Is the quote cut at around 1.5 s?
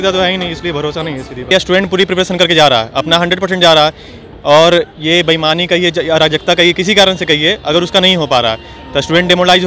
yes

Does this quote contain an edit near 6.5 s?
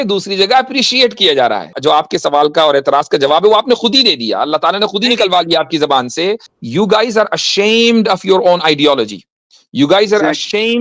yes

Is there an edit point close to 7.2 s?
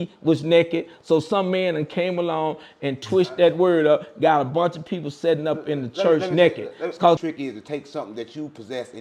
yes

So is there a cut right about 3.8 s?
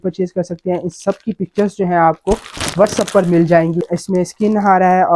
yes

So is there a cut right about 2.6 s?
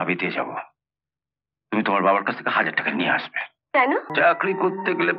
no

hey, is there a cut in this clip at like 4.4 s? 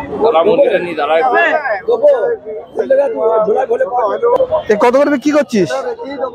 yes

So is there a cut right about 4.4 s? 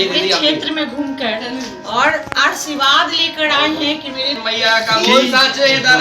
yes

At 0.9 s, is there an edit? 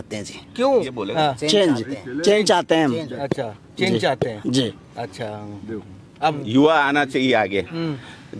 yes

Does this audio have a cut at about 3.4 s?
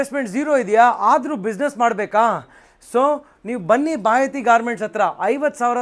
no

